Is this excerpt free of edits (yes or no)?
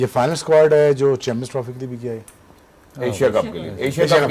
yes